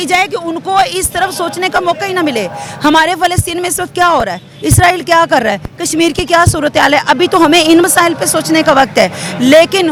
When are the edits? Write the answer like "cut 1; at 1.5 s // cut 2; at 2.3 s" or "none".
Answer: none